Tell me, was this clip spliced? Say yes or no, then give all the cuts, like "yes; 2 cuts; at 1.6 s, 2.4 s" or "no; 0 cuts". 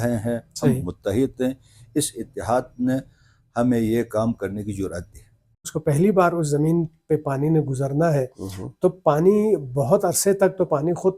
yes; 1 cut; at 5.6 s